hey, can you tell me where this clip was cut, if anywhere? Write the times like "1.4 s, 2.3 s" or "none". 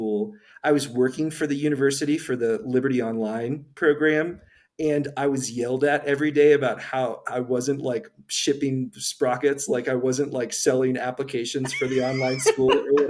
none